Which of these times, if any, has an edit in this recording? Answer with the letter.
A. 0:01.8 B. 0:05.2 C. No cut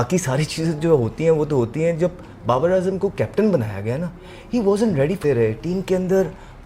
B